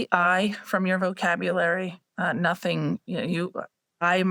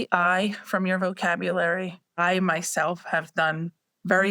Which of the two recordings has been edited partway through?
second; 1 cut; at 2.0 s

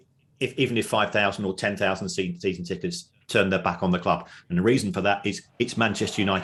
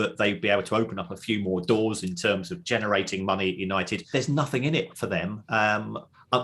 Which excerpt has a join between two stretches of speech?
second; 1 cut; at 4.0 s

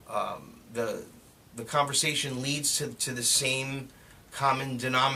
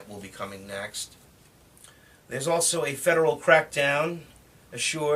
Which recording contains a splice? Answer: second; 1 cut; at 3.8 s

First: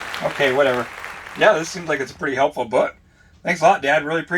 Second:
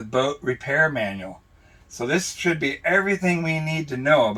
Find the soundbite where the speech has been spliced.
first; 1 cut; at 1.2 s

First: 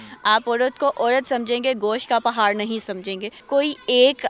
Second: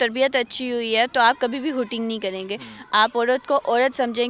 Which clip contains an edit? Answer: first; 1 cut; at 3.3 s

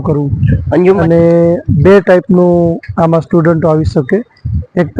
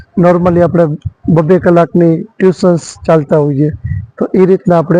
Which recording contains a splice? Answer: first; 1 cut; at 1.0 s

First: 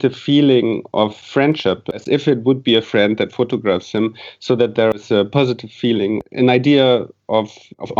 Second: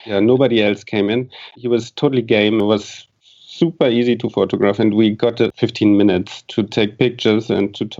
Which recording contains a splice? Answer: first; 1 cut; at 2.0 s

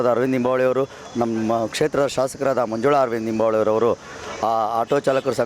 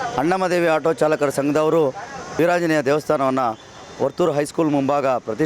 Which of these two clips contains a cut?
second; 1 cut; at 2.3 s

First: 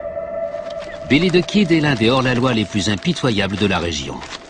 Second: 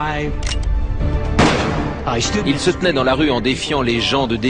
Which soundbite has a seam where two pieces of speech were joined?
second; 1 cut; at 3.0 s

